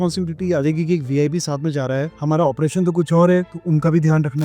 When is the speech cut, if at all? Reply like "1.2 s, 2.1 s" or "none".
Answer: 2.1 s, 3.6 s